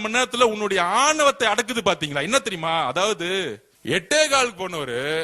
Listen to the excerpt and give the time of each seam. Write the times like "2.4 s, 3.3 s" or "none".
3.7 s

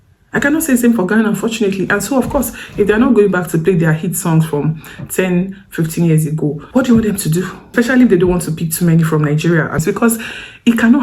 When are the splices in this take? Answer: 6.6 s, 7.6 s, 9.8 s

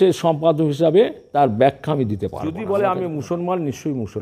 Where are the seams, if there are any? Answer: 1.2 s, 2.5 s

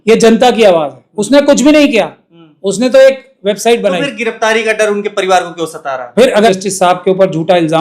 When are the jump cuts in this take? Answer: 6.5 s

